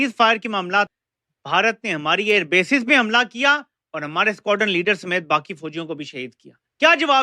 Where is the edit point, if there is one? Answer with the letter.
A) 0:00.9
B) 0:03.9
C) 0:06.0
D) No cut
A